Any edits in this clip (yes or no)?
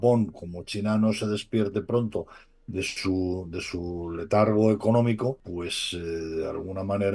yes